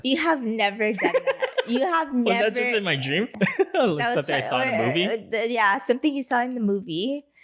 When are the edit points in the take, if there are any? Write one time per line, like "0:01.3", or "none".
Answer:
0:03.3